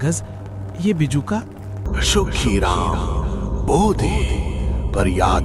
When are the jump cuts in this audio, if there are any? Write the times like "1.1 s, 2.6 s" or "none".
1.9 s